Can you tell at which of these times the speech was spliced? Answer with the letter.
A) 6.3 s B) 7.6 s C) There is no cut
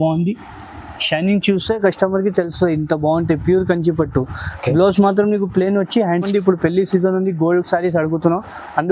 A